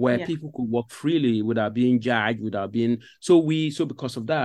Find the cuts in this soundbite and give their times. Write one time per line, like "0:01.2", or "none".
none